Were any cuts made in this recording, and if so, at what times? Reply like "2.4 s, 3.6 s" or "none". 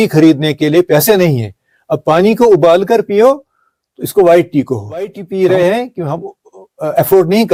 none